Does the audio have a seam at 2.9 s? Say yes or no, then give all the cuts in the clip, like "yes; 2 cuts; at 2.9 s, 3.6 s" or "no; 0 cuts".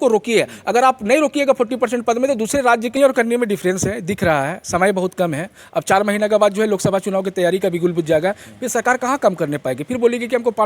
yes; 1 cut; at 2.9 s